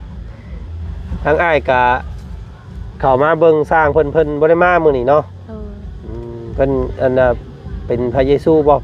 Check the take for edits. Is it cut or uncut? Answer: uncut